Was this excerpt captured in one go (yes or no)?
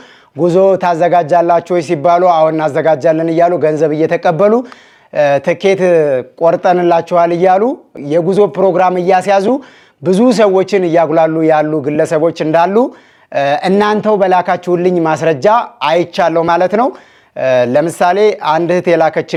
yes